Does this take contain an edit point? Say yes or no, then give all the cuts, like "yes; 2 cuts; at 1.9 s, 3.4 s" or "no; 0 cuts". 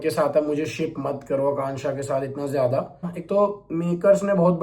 yes; 1 cut; at 3.2 s